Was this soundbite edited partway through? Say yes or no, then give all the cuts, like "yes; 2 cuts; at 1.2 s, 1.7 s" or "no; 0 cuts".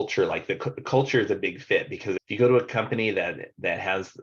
yes; 1 cut; at 2.2 s